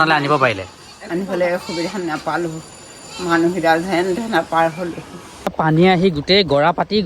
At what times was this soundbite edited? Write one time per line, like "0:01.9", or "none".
0:05.5